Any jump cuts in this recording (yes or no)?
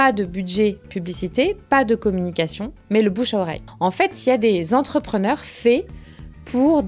yes